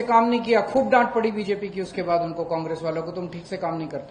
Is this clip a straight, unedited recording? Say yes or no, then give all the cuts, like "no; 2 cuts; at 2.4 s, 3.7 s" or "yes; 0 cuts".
yes; 0 cuts